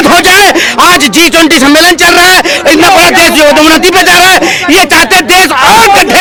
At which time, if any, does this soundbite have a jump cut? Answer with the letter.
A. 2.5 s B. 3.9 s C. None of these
C